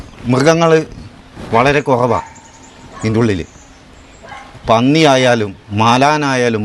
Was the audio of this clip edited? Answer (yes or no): no